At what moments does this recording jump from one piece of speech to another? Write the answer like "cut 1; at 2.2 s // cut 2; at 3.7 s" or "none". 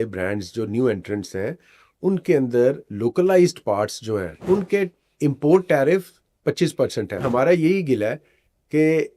cut 1; at 4.3 s // cut 2; at 7.2 s